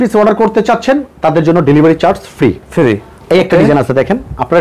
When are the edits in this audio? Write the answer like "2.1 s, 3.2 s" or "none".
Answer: none